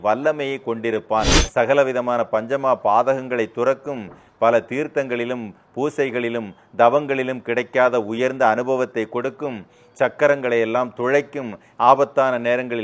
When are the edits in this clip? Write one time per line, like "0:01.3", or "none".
0:01.3